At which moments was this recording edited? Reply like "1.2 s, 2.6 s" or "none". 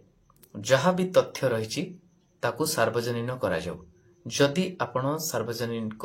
none